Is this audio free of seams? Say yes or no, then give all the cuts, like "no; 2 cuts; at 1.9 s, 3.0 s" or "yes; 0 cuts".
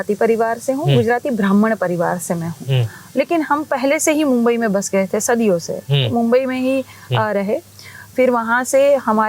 yes; 0 cuts